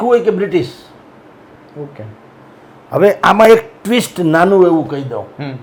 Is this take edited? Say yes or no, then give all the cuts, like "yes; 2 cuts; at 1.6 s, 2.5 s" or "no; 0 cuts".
no; 0 cuts